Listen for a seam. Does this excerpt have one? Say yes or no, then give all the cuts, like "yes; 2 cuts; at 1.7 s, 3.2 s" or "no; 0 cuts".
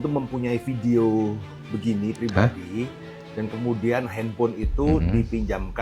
no; 0 cuts